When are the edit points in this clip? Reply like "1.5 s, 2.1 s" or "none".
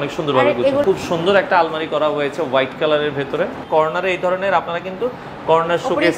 0.8 s, 3.6 s